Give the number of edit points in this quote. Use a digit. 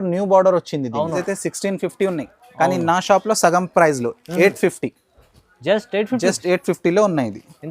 1